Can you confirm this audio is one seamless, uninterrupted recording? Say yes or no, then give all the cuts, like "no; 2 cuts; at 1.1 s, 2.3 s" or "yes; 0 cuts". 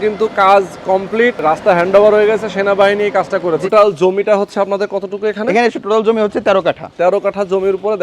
no; 4 cuts; at 1.4 s, 3.6 s, 5.8 s, 6.9 s